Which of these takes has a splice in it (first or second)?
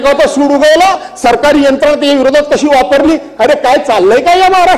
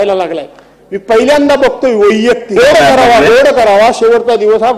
second